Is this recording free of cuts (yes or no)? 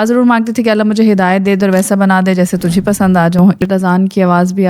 no